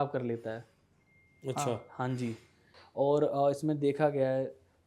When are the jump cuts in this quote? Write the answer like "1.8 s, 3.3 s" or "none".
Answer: 2.7 s